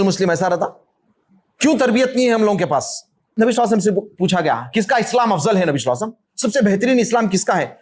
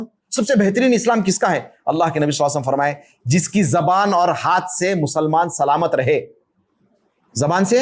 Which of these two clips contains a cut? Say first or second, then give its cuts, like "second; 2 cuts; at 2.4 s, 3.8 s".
first; 1 cut; at 3.2 s